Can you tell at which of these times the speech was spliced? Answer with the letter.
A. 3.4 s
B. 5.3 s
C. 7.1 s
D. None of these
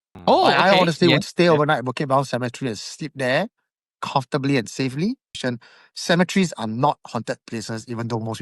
B